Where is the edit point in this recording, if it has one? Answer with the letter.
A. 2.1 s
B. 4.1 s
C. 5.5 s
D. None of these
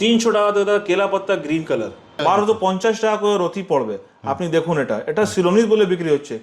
A